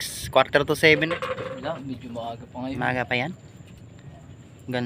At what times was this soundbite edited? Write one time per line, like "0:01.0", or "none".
0:01.1